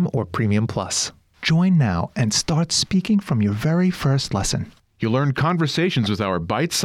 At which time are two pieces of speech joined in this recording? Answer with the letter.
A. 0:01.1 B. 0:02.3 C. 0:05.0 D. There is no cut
A